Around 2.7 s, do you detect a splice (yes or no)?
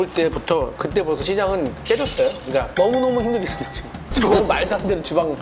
yes